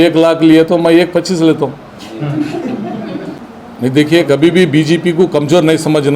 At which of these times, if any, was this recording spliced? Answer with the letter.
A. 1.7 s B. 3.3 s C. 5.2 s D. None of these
B